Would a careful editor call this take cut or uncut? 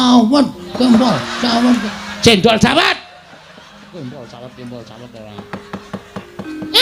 cut